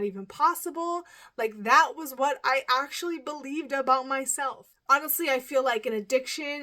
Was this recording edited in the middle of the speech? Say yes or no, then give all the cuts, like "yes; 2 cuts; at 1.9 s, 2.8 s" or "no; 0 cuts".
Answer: yes; 1 cut; at 4.6 s